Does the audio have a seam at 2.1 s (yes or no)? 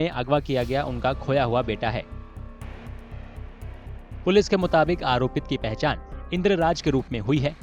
yes